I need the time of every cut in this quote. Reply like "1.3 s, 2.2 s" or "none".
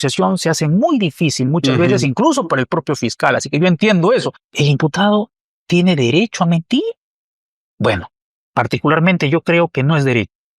4.4 s

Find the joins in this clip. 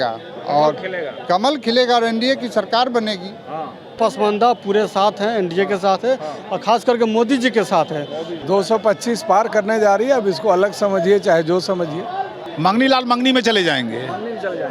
4.0 s, 8.4 s, 12.4 s

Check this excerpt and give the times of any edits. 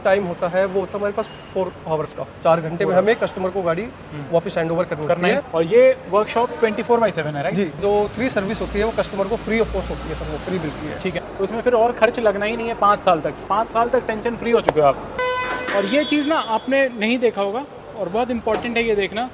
5.4 s, 7.8 s, 11.3 s, 15.2 s

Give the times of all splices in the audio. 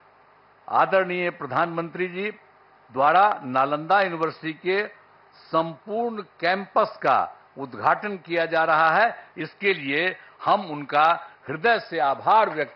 none

